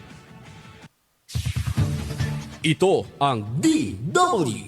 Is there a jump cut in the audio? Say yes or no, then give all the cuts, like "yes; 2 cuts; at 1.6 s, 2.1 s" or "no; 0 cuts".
yes; 1 cut; at 0.9 s